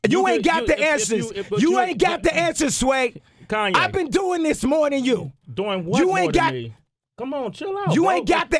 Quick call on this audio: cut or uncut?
uncut